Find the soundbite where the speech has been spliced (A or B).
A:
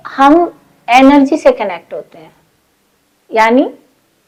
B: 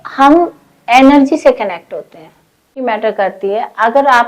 B